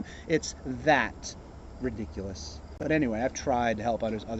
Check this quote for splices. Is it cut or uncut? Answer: uncut